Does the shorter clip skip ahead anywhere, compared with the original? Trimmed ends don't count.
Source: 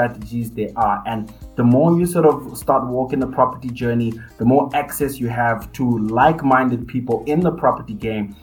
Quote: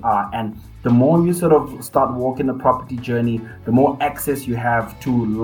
no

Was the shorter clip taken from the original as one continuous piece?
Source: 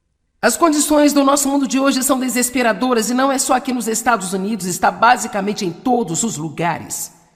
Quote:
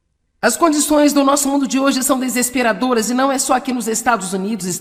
yes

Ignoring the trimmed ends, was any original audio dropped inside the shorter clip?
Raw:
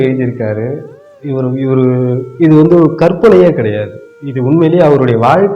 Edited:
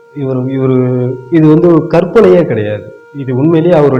no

